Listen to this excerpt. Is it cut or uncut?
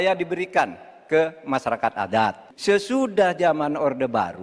cut